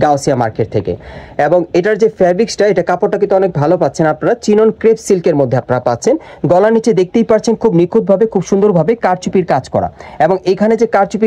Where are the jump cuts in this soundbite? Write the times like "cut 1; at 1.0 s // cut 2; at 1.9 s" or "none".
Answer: none